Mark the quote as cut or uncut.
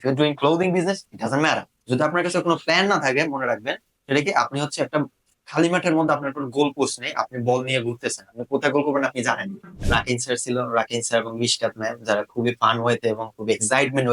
cut